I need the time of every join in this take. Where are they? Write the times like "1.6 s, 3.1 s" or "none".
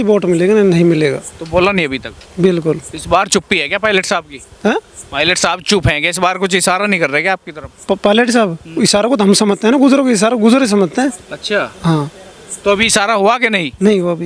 none